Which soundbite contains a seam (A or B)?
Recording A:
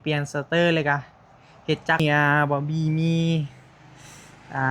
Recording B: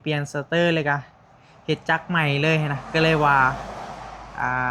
A